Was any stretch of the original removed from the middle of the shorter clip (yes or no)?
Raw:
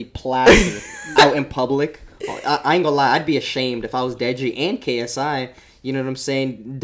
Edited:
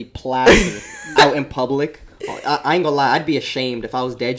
no